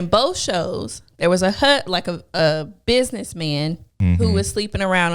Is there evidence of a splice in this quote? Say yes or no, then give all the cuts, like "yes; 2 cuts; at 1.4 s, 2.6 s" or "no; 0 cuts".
yes; 1 cut; at 3.9 s